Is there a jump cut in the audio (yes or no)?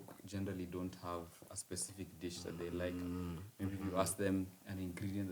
no